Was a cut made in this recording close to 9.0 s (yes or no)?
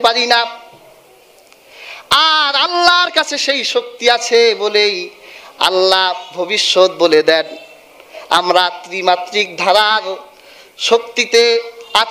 no